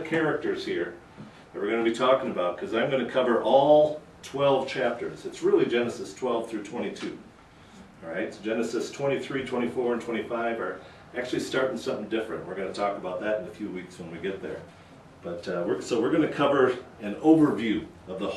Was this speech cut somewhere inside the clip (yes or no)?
yes